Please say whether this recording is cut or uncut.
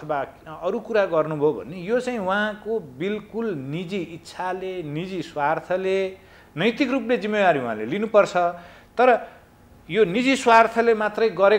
uncut